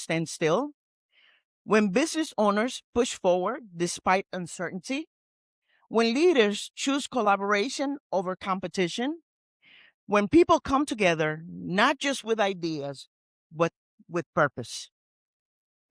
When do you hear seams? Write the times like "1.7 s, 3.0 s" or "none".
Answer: none